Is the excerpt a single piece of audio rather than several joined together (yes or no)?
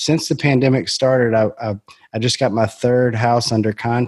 yes